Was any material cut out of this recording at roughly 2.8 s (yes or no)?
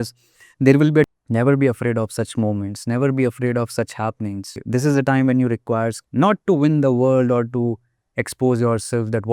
no